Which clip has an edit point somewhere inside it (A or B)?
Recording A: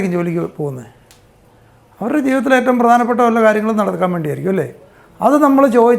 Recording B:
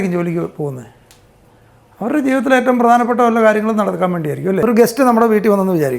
B